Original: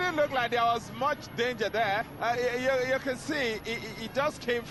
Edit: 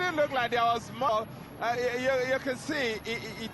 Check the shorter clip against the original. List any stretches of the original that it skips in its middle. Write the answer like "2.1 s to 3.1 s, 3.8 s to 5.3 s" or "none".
1.4 s to 2.0 s